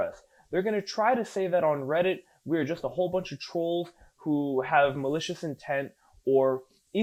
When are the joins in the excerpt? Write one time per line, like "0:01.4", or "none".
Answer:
none